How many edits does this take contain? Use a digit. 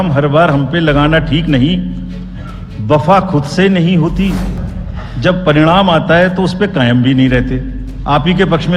1